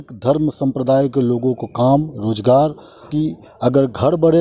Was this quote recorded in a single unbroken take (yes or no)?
no